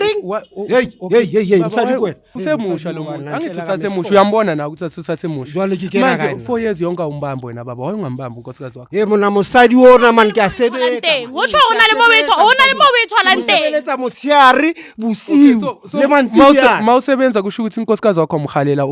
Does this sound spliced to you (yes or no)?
yes